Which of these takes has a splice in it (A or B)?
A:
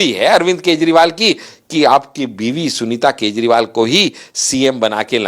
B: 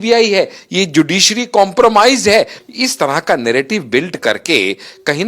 B